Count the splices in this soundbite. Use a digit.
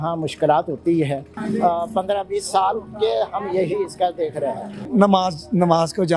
2